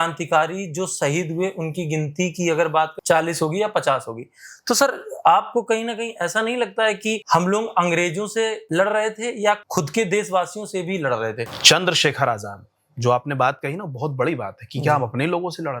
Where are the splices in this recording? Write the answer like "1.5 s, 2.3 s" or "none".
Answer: 3.0 s, 7.2 s, 8.6 s, 9.7 s, 11.5 s